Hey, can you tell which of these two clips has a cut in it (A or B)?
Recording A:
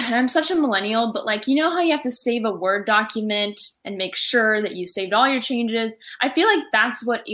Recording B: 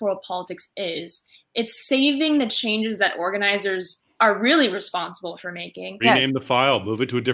B